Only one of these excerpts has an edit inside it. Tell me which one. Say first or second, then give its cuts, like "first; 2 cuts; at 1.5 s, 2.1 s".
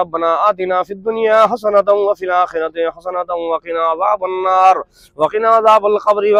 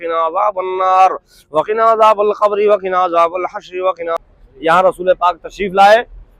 second; 1 cut; at 4.2 s